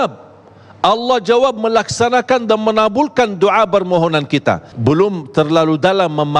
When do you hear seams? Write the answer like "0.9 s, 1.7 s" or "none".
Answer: 4.7 s